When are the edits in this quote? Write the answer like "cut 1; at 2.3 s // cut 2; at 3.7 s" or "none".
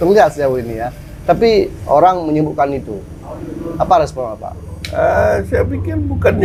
none